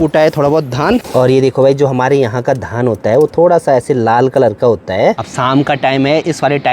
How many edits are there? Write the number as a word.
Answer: two